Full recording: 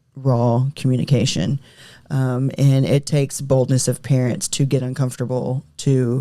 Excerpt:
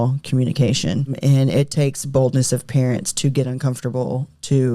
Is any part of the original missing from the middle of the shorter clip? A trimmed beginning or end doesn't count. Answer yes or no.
yes